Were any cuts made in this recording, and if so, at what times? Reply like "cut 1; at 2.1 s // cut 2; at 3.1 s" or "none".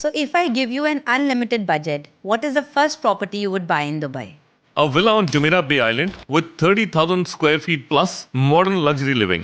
cut 1; at 8.2 s

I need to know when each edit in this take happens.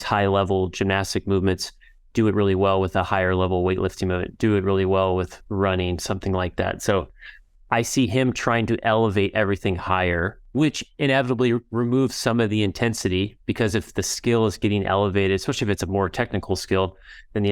cut 1; at 10.4 s

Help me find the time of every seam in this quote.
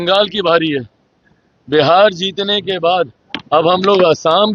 none

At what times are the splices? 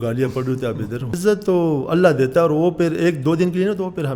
cut 1; at 1.2 s

